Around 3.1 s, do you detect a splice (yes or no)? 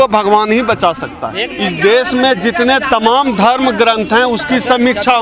no